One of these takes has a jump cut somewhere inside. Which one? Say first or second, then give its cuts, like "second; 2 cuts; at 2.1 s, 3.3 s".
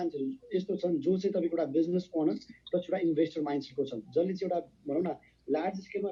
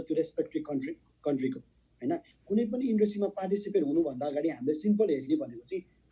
second; 1 cut; at 2.3 s